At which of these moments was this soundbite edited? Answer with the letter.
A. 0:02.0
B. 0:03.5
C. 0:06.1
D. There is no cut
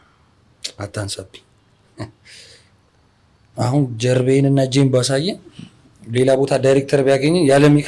B